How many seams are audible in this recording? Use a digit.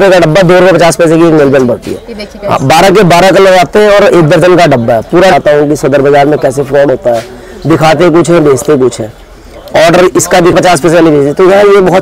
2